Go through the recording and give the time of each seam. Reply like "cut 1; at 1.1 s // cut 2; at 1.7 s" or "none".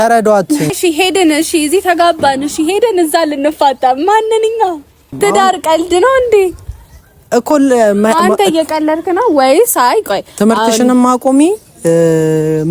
cut 1; at 0.7 s // cut 2; at 5.1 s